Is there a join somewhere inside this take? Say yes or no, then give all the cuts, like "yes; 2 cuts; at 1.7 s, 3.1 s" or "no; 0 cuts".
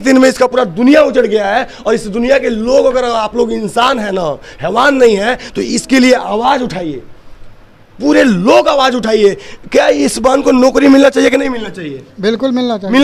no; 0 cuts